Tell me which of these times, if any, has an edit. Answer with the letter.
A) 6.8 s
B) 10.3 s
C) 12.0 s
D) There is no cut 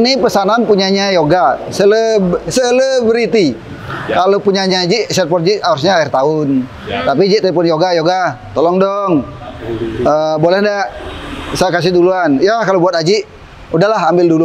D